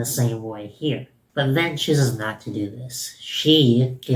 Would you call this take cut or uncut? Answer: cut